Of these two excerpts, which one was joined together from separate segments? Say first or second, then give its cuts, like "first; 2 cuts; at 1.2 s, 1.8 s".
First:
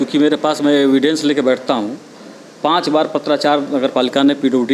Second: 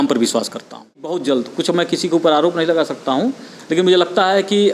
second; 1 cut; at 1.2 s